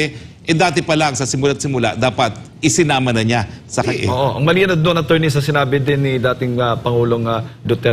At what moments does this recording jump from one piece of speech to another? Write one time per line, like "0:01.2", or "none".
0:03.9